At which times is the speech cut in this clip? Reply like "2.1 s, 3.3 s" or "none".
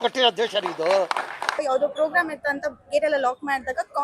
1.6 s